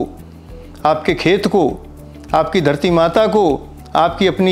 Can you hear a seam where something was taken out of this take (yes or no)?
no